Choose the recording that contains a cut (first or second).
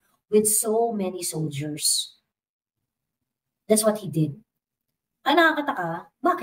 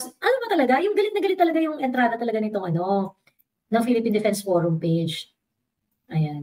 second